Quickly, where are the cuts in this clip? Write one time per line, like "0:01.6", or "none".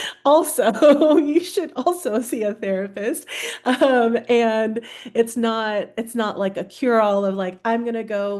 none